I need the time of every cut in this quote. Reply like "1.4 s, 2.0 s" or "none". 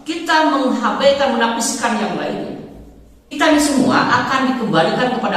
3.4 s